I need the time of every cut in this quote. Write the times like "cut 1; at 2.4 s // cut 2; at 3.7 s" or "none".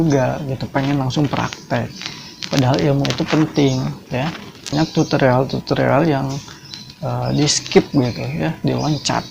cut 1; at 4.7 s